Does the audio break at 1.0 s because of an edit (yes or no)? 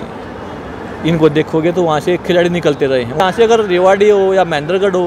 no